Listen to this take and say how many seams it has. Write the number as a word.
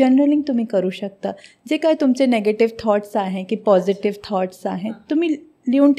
zero